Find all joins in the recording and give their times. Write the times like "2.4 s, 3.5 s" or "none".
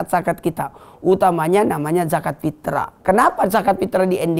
2.9 s